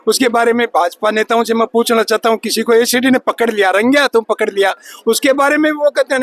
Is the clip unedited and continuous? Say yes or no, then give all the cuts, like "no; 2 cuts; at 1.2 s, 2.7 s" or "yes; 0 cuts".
yes; 0 cuts